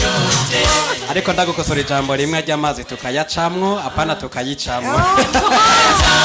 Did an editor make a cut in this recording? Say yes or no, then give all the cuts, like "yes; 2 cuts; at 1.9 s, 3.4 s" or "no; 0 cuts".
no; 0 cuts